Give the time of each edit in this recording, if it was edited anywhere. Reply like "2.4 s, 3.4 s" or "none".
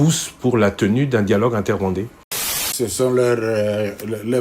2.6 s